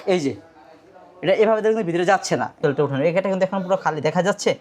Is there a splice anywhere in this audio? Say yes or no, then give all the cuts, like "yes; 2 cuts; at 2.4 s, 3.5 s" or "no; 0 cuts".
yes; 1 cut; at 2.5 s